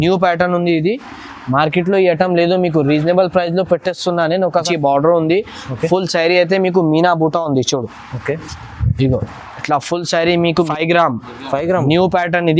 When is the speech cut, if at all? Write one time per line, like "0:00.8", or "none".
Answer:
0:04.6
0:10.6